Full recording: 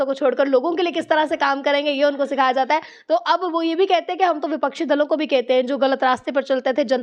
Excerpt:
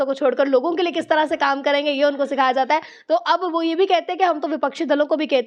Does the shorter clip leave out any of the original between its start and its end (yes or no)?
no